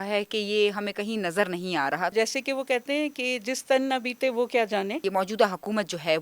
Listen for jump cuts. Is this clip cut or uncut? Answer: cut